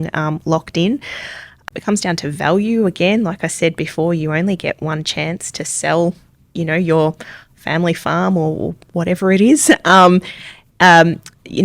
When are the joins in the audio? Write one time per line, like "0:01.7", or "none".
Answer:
0:01.6